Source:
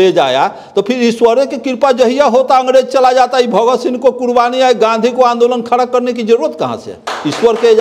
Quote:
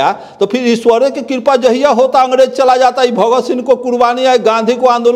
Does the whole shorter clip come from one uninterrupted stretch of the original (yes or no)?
yes